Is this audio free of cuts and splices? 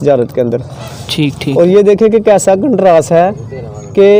yes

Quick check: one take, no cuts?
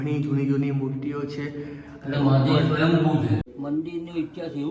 no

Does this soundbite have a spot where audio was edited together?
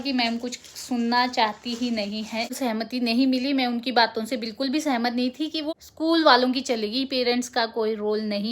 yes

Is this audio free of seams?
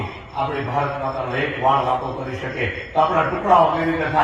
yes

